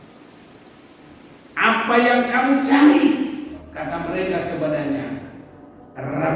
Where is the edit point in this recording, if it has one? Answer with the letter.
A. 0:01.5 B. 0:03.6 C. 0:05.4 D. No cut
B